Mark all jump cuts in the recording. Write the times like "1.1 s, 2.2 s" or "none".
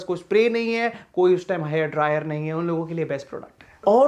none